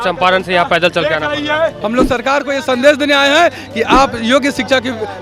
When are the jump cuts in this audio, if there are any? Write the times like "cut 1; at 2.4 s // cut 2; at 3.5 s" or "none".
cut 1; at 1.8 s